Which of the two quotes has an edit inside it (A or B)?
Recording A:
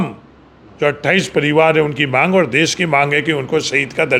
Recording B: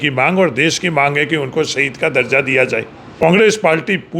B